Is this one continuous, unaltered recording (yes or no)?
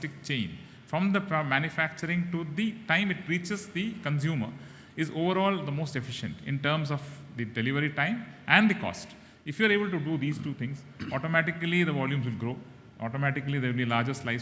yes